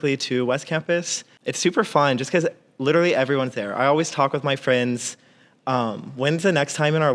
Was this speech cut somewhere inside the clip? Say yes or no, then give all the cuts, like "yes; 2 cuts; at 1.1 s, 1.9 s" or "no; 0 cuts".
yes; 1 cut; at 1.3 s